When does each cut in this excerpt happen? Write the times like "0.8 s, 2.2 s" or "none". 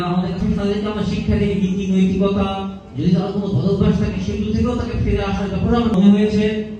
none